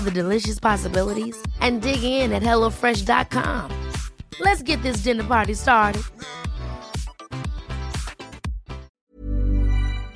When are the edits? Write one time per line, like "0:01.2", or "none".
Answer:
0:08.9